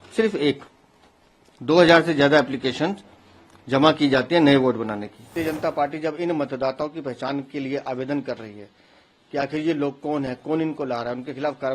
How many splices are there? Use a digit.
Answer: 1